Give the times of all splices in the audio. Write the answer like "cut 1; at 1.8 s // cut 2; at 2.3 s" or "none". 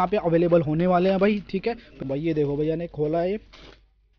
cut 1; at 2.0 s